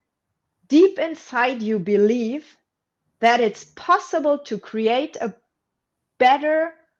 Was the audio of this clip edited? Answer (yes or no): no